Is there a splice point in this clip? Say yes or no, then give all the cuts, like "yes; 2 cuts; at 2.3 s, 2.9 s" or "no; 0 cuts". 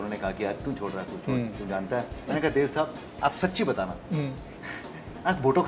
yes; 1 cut; at 2.2 s